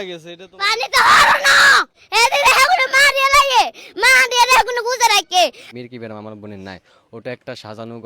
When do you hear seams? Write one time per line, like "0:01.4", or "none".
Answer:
0:02.0
0:05.7